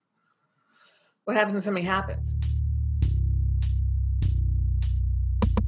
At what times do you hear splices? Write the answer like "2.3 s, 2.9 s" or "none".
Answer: 2.2 s